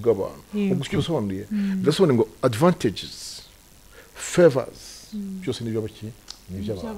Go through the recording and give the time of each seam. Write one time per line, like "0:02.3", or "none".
none